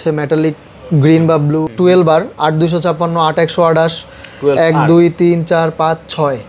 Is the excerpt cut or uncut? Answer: cut